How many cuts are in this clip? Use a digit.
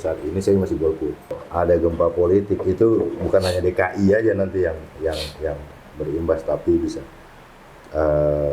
1